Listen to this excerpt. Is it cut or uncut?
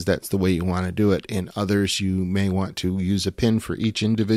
uncut